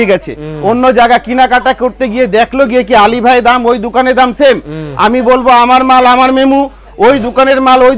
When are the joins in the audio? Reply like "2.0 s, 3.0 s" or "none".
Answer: none